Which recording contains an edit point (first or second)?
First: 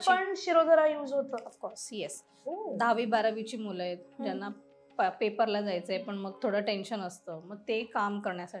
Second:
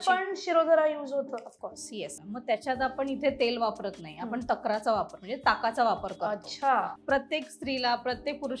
second